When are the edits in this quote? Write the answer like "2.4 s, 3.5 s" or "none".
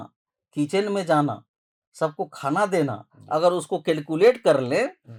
none